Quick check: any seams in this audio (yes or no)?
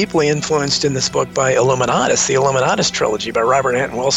no